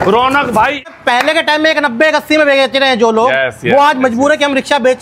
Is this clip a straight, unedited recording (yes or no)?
no